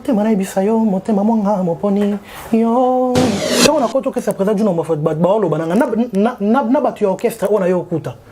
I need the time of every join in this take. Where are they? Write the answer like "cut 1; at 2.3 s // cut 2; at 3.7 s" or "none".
cut 1; at 3.5 s

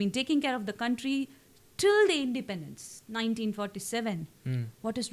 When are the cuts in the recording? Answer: none

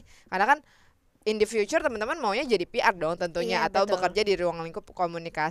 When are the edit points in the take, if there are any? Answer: none

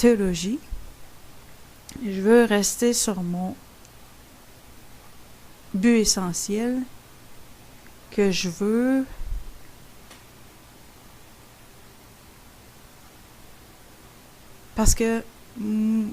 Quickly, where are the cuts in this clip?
cut 1; at 13.9 s

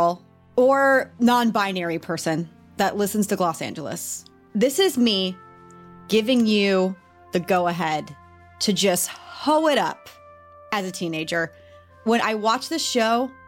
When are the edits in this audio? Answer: cut 1; at 2.6 s

